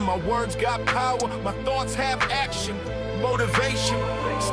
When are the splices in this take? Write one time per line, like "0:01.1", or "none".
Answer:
none